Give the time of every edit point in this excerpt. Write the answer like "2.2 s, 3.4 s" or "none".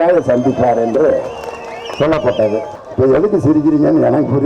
2.8 s